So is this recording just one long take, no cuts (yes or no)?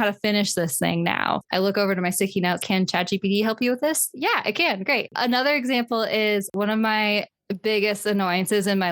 no